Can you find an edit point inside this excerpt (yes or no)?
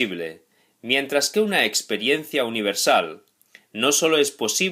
yes